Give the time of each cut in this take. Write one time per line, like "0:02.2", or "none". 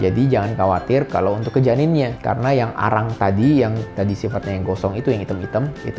none